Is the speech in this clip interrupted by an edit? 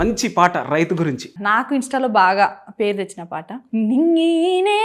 yes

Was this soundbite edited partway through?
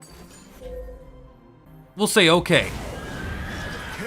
yes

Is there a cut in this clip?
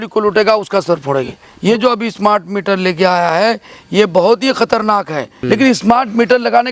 yes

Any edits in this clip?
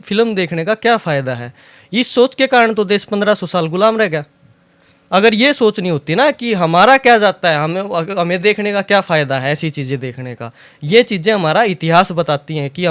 no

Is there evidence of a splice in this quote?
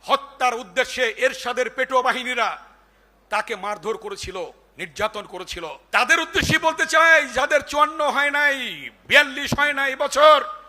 yes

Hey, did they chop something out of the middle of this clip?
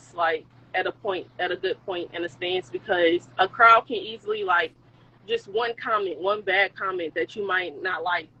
no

